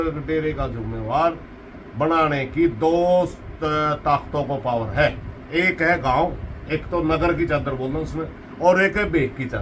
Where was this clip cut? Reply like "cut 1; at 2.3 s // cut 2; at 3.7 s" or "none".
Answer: none